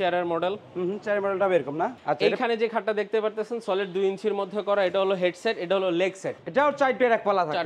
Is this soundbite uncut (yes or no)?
no